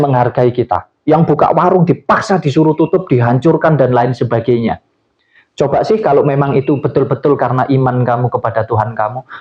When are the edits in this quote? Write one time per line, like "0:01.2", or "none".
none